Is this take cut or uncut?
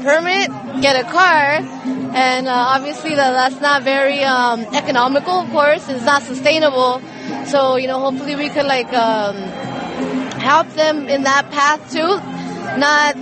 cut